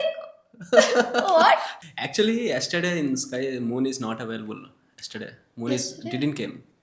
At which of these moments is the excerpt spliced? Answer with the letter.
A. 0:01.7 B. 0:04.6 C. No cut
A